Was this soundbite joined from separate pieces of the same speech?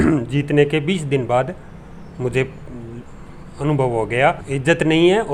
no; 0 cuts

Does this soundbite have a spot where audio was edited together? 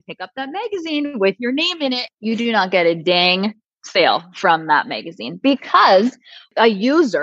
yes; 1 cut; at 2.1 s

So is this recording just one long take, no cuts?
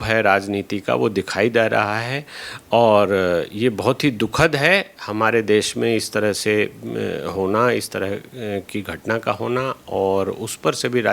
yes; 0 cuts

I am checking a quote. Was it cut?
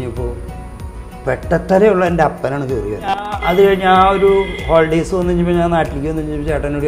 yes; 1 cut; at 3.3 s

